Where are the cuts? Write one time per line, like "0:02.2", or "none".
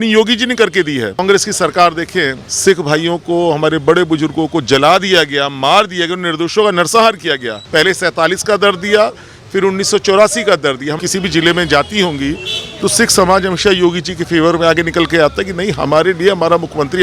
0:01.2
0:02.4
0:07.6
0:11.0